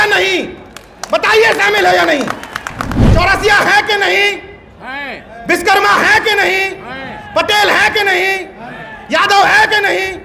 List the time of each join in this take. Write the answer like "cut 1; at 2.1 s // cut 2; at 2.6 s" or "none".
cut 1; at 3.0 s